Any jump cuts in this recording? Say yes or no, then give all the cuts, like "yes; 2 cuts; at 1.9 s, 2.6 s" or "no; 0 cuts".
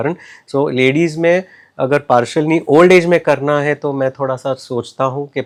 no; 0 cuts